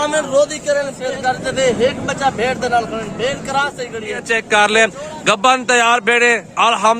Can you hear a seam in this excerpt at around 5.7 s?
no; 2 cuts; at 1.1 s, 4.2 s

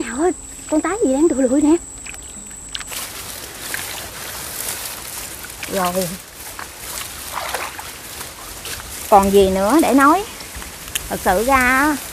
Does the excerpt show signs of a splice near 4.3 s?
no; 1 cut; at 3.0 s

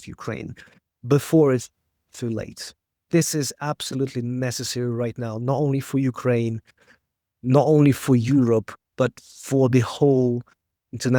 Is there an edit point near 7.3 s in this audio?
no; 1 cut; at 3.1 s

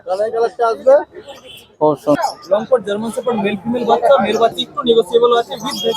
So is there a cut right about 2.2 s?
yes; 2 cuts; at 2.2 s, 4.6 s

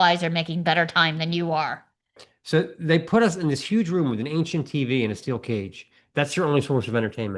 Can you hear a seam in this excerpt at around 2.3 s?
yes; 1 cut; at 2.3 s

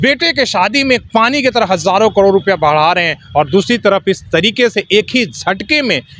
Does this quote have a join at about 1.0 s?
yes; 1 cut; at 1.0 s

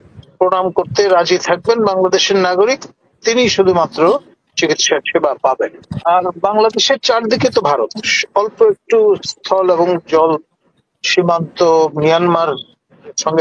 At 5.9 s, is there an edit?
yes; 1 cut; at 5.9 s

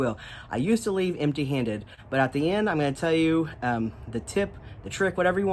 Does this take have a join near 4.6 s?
no; 1 cut; at 2.0 s

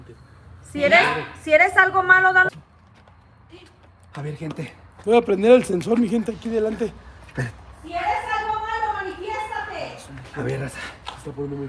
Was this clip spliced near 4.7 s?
no; 1 cut; at 2.7 s

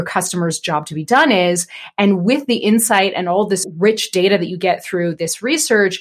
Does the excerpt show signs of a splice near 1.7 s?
no; 1 cut; at 3.7 s

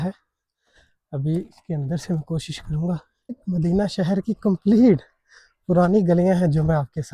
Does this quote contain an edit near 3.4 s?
yes; 1 cut; at 3.4 s

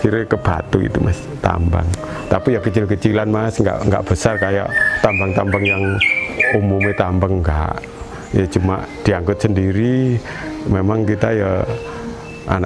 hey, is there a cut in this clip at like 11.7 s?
no; 0 cuts

